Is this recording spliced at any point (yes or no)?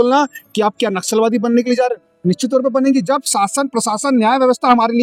no